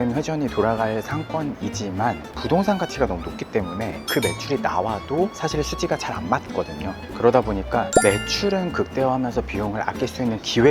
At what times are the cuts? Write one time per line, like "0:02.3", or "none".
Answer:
none